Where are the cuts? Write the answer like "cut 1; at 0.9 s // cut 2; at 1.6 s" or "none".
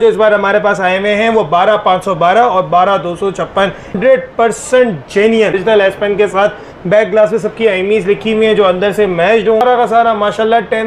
cut 1; at 3.9 s // cut 2; at 5.6 s // cut 3; at 9.6 s